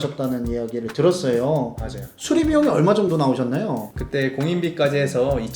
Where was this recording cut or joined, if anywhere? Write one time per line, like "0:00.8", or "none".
0:01.8

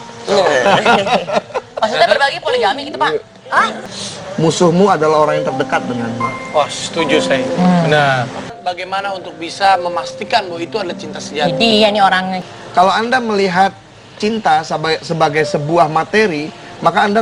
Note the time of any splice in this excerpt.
0:03.9
0:08.6
0:12.4

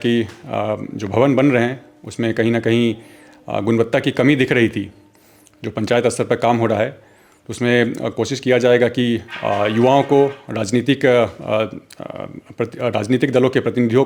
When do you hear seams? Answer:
none

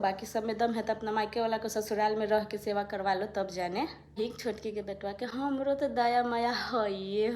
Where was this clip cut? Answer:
0:04.2

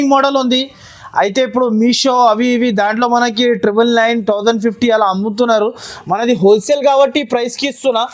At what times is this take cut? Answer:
none

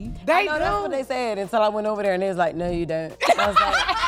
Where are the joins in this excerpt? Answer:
none

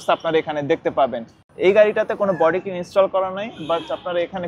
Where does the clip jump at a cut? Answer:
0:01.4

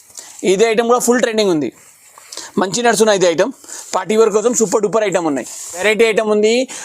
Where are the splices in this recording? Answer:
0:05.8

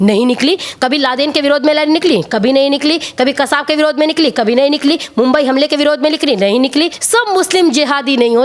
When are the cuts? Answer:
0:07.0

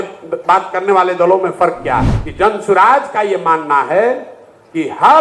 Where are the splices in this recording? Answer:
0:02.2

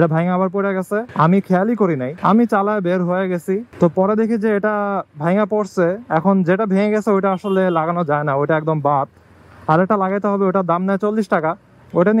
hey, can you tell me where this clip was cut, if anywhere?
0:01.1
0:02.1
0:03.7

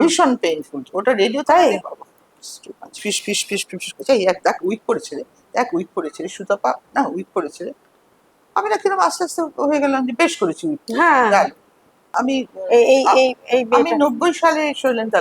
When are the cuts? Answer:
0:03.0
0:12.1

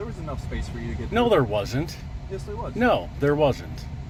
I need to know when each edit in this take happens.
none

